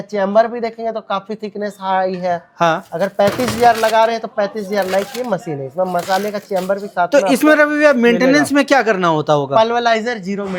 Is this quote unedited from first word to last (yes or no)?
yes